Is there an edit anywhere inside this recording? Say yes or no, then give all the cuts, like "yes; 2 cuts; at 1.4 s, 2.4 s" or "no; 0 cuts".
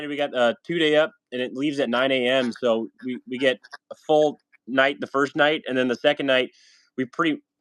no; 0 cuts